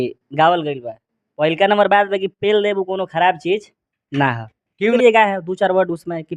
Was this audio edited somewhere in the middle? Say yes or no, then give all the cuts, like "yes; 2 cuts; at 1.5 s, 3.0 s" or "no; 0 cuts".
yes; 1 cut; at 4.9 s